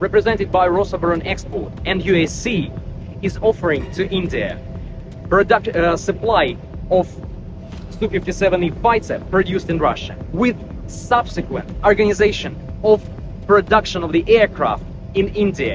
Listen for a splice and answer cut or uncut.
uncut